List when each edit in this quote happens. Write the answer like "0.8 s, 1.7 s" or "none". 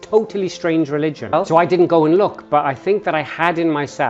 1.3 s